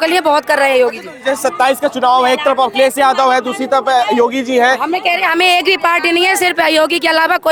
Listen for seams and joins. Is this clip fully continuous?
yes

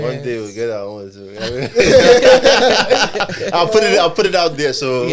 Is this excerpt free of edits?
yes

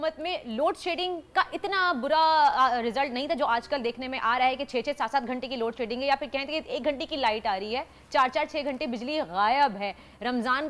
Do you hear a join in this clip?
no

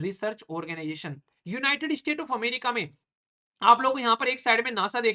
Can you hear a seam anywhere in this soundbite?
yes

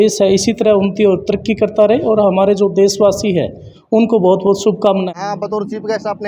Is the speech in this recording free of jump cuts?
no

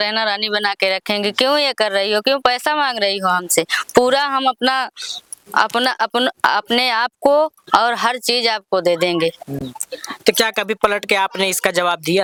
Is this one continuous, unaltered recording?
yes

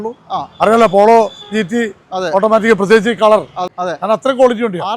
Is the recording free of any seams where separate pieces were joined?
no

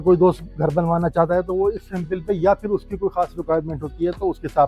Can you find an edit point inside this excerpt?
no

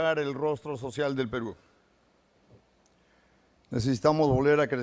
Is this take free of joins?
no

